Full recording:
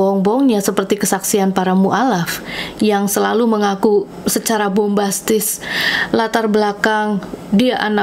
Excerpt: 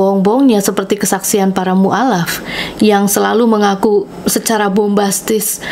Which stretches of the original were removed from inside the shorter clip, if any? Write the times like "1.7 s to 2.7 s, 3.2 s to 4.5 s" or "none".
none